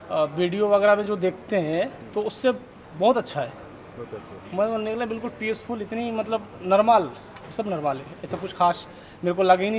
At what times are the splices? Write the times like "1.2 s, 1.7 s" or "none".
none